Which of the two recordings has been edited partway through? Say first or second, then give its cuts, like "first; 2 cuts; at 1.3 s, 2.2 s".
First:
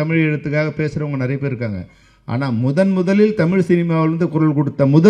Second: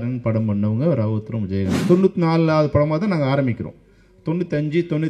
second; 1 cut; at 1.7 s